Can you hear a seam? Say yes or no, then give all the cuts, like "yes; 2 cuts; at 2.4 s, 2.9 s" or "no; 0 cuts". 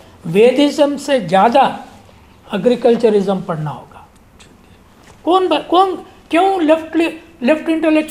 no; 0 cuts